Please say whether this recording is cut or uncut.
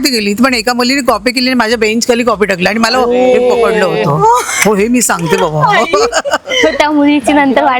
uncut